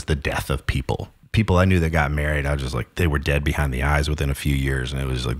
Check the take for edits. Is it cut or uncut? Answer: cut